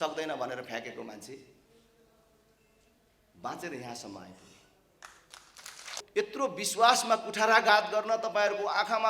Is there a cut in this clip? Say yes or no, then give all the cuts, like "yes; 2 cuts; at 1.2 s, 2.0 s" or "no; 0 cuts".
yes; 1 cut; at 6.0 s